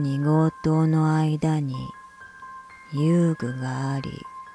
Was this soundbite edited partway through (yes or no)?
no